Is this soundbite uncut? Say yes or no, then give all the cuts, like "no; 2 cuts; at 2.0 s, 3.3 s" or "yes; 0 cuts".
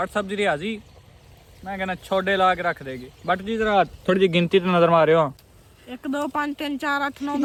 yes; 0 cuts